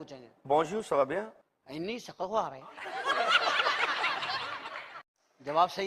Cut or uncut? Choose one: uncut